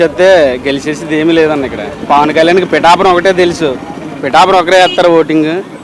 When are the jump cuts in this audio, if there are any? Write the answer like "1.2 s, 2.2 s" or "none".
1.9 s